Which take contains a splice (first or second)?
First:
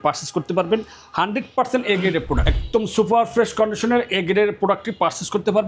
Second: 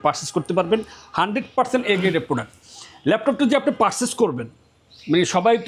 first